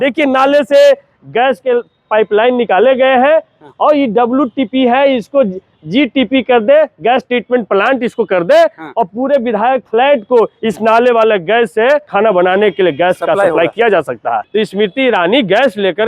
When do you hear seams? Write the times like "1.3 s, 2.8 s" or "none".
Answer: 12.1 s, 14.4 s